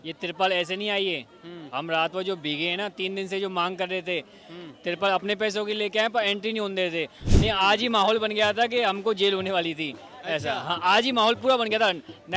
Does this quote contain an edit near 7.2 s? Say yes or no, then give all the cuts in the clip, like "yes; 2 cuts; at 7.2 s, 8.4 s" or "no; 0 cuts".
yes; 1 cut; at 7.2 s